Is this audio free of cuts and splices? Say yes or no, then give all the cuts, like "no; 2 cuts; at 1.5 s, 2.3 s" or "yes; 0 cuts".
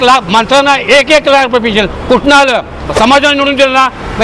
no; 1 cut; at 2.8 s